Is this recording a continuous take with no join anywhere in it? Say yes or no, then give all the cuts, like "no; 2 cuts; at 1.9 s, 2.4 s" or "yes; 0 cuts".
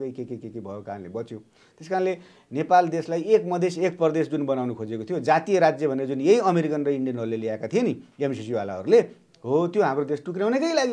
yes; 0 cuts